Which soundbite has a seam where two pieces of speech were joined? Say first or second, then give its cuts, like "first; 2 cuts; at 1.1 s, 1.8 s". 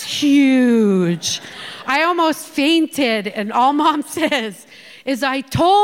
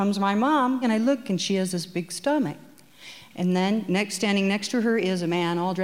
second; 1 cut; at 3.2 s